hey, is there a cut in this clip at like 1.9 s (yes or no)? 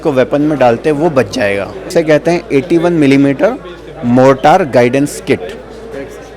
yes